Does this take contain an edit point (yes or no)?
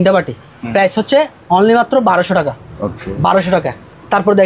no